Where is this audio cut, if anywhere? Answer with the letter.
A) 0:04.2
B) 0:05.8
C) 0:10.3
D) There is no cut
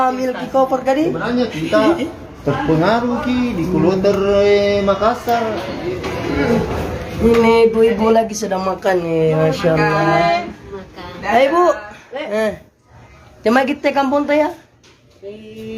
B